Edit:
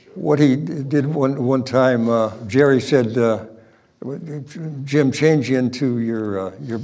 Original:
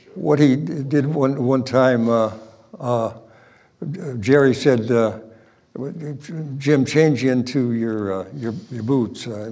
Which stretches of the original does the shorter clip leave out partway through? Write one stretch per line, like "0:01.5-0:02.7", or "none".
0:02.4-0:04.1